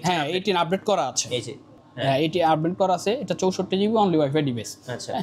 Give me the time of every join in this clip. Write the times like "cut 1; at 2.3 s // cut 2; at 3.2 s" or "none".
none